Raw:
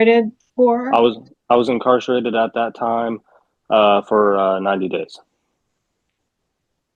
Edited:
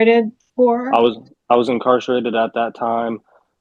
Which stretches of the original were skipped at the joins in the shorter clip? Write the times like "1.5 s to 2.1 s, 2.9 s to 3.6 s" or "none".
none